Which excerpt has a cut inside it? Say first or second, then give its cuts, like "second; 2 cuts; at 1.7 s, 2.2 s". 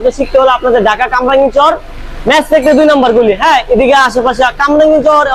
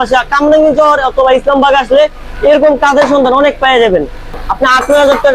second; 1 cut; at 4.3 s